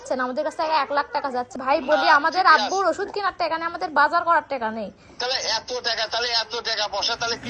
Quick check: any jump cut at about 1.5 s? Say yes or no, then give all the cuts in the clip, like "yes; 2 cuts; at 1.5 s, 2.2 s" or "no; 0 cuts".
yes; 1 cut; at 1.5 s